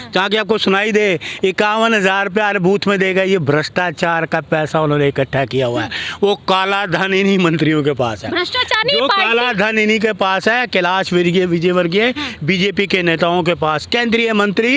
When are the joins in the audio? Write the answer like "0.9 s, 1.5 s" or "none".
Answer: none